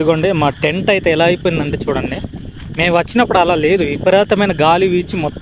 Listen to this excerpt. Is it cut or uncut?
uncut